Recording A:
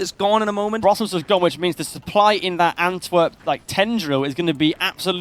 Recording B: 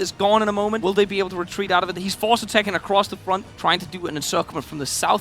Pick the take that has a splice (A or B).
B